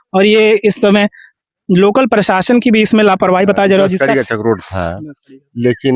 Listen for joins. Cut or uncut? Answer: cut